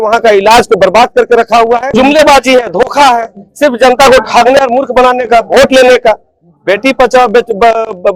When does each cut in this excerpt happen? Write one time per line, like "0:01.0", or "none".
0:01.9

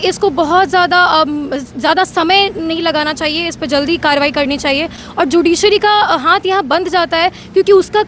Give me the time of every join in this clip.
none

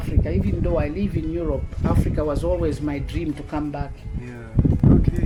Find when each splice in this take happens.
none

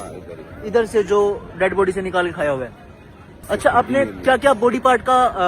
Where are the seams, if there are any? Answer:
0:03.4

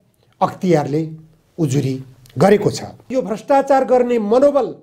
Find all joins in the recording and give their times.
0:02.9

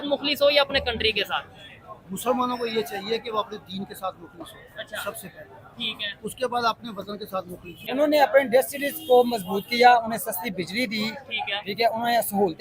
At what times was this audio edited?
0:07.8

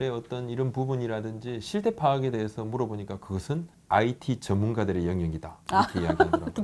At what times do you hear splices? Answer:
0:03.8

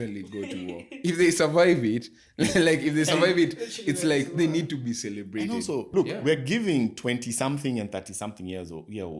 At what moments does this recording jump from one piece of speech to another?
0:05.9

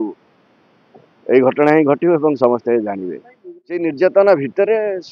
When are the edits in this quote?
0:03.8

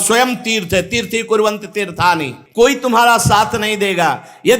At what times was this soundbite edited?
0:02.4

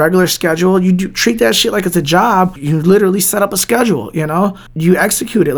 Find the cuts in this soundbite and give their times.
0:02.6
0:04.7

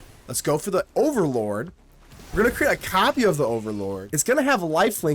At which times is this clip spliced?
0:04.1

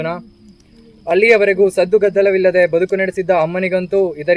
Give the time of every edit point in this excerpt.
none

